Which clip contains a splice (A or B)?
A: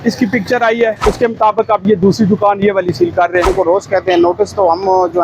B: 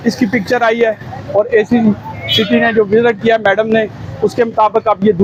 A